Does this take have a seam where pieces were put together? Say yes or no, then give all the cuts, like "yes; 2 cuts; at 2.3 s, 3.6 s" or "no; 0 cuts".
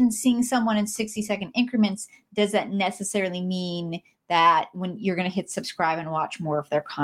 no; 0 cuts